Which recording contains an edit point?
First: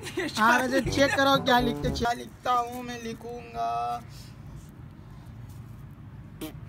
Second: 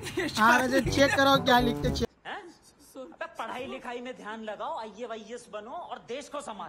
first; 1 cut; at 2.1 s

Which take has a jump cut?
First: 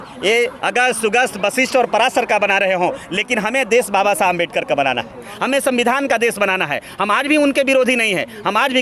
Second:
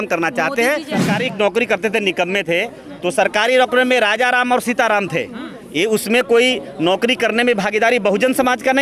second; 1 cut; at 1.1 s

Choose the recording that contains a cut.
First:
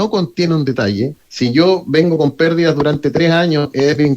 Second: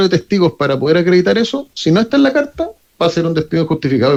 first; 1 cut; at 1.2 s

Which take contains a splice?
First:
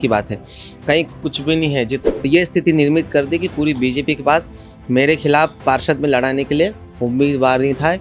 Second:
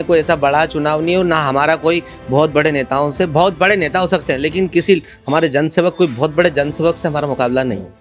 first; 1 cut; at 2.0 s

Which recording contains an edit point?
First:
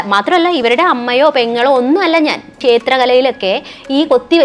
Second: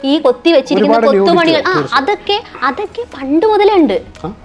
first; 1 cut; at 2.5 s

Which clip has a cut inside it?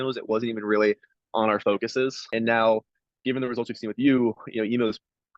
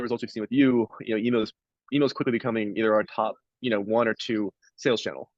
first; 1 cut; at 2.2 s

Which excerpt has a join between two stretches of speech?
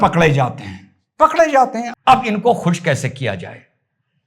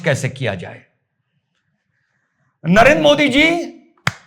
first; 1 cut; at 1.9 s

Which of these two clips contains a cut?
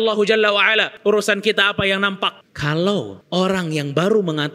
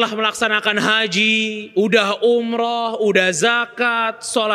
first; 3 cuts; at 0.9 s, 2.5 s, 3.2 s

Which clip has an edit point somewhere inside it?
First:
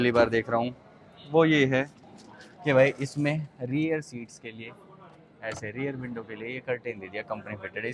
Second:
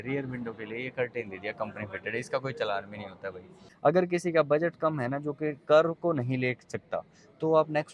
second; 1 cut; at 3.6 s

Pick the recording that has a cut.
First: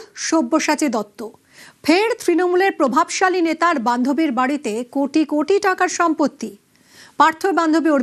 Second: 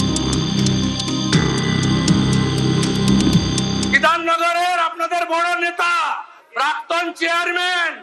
second; 1 cut; at 3.5 s

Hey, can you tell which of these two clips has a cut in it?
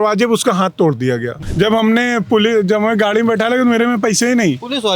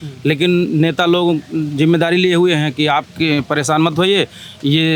first; 1 cut; at 1.4 s

